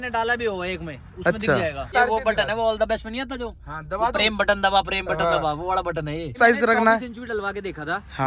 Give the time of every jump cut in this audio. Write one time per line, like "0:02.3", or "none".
0:01.8
0:06.4